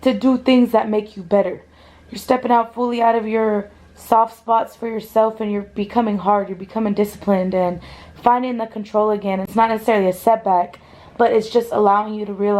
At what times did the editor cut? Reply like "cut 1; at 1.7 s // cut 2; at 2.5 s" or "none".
cut 1; at 9.4 s